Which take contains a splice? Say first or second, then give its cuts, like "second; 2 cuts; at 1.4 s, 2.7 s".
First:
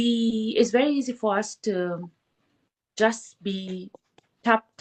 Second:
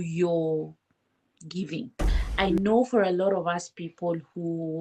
second; 1 cut; at 2.2 s